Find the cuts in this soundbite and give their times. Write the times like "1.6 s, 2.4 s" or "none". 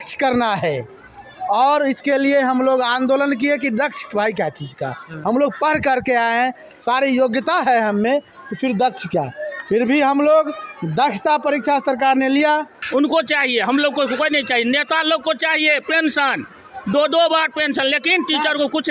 12.8 s